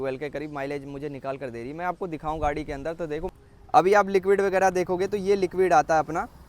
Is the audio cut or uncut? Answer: cut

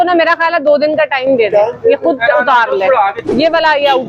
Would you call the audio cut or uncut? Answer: cut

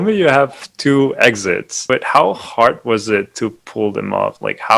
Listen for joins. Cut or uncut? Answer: cut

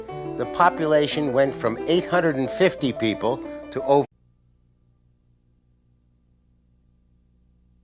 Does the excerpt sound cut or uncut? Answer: uncut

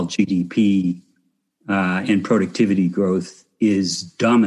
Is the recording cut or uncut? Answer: uncut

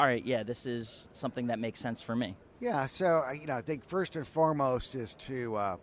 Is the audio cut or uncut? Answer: uncut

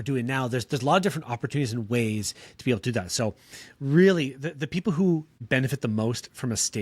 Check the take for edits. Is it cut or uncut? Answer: cut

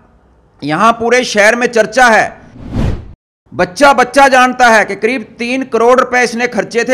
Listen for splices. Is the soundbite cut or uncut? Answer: cut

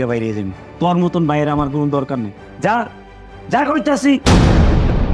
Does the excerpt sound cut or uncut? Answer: cut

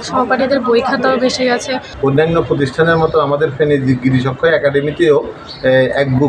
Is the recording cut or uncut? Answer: cut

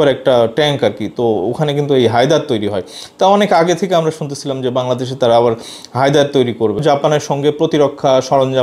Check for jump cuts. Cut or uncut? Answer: cut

